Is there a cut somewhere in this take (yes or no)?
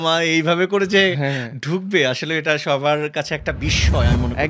no